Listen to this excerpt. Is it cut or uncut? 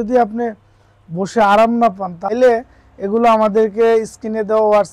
cut